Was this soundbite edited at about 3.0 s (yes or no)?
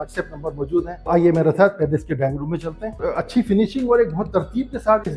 yes